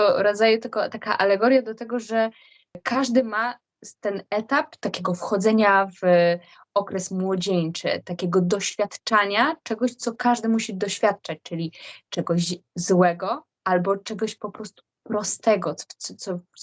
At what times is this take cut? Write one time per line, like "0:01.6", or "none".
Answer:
0:02.8
0:04.8